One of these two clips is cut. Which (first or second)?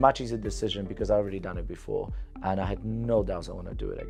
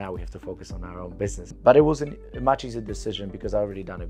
second